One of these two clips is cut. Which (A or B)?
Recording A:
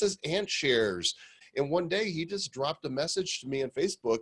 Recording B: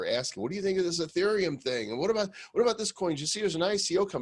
A